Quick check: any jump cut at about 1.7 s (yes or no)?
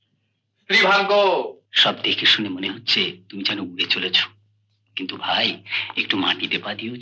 yes